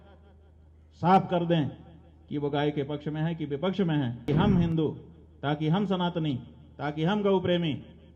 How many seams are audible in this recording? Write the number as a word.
one